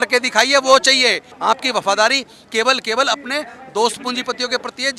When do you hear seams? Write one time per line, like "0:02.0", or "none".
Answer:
0:01.3